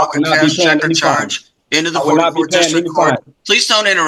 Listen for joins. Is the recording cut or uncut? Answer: uncut